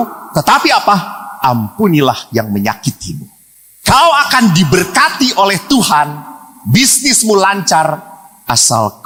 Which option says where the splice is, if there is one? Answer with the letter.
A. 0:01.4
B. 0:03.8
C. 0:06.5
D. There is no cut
D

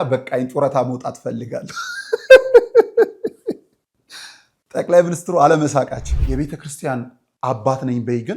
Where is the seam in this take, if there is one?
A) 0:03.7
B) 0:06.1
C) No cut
B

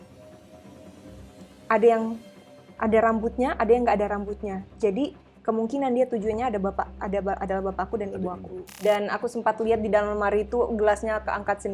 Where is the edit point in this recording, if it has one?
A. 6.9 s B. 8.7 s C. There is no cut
B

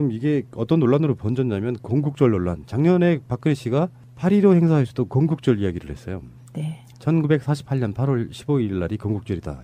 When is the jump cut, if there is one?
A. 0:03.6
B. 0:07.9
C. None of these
B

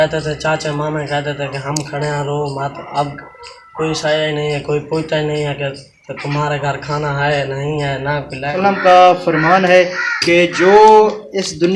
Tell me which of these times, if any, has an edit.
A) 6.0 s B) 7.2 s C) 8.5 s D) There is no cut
C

